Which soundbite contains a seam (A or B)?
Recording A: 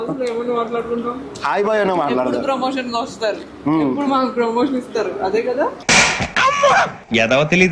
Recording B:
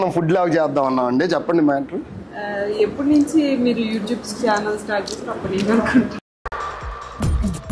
A